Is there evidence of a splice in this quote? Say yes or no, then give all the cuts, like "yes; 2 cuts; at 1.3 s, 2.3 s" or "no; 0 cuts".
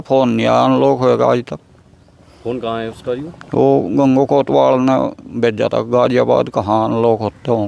no; 0 cuts